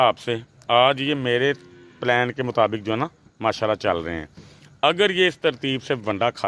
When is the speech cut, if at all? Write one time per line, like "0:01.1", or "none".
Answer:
none